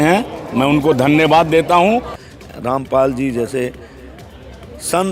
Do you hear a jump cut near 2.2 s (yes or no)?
yes